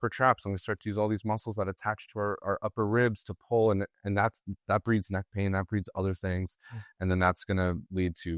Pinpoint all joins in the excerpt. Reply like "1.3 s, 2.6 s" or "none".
none